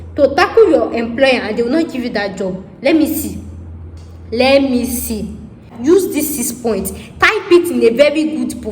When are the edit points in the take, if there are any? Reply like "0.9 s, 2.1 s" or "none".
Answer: 5.7 s